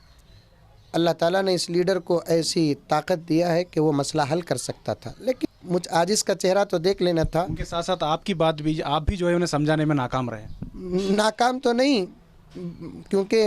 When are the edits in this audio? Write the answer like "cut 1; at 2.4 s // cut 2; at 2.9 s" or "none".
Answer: cut 1; at 5.4 s